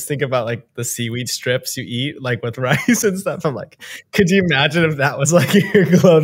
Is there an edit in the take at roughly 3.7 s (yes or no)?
no